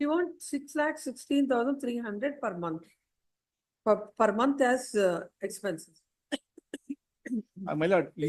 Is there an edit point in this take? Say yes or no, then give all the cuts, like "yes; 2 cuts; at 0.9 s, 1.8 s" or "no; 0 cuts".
no; 0 cuts